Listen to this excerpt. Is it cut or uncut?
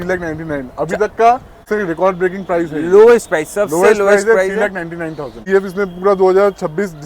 cut